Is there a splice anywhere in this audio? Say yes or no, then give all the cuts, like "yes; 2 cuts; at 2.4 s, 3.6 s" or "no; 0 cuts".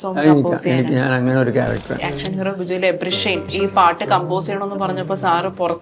yes; 2 cuts; at 2.0 s, 3.5 s